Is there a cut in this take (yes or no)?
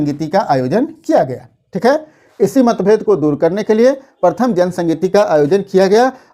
no